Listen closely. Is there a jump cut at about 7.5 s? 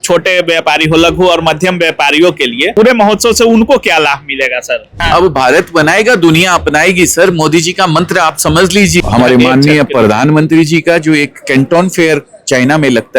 no; 3 cuts; at 2.7 s, 4.9 s, 9.0 s

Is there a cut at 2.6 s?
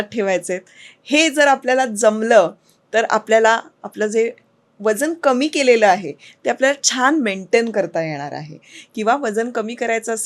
no; 0 cuts

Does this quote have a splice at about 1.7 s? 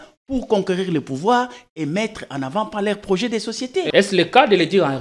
no; 1 cut; at 3.9 s

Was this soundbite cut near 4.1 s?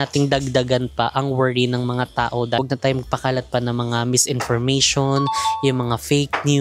no; 1 cut; at 2.6 s

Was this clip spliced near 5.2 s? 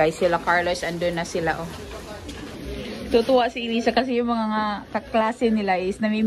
no; 1 cut; at 2.6 s

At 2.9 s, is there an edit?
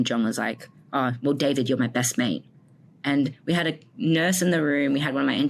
no; 0 cuts

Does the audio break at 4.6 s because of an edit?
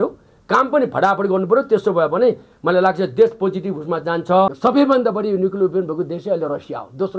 yes; 1 cut; at 4.6 s

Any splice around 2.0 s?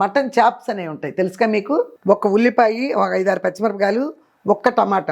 yes; 1 cut; at 2.0 s

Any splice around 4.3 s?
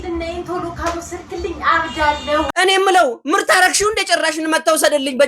no; 1 cut; at 2.5 s

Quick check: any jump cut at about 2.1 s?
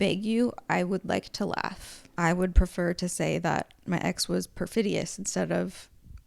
yes; 1 cut; at 2.1 s

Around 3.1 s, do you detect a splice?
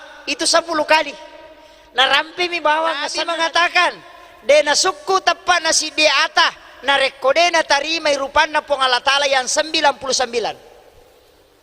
yes; 1 cut; at 3.1 s

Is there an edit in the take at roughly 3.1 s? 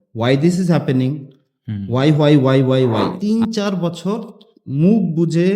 yes; 1 cut; at 3.1 s

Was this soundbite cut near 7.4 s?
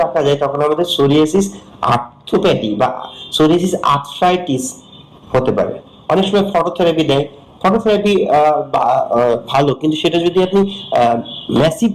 no; 1 cut; at 5.9 s

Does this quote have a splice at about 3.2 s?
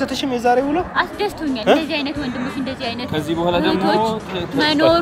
no; 1 cut; at 1.6 s

